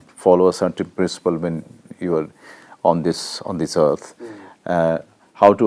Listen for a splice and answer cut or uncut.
uncut